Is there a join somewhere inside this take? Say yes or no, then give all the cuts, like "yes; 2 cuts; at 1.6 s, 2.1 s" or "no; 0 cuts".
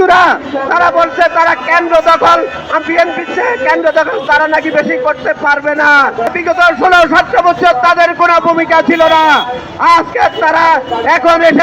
yes; 1 cut; at 6.3 s